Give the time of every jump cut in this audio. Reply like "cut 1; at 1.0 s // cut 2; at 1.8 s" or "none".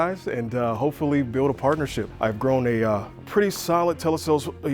cut 1; at 2.0 s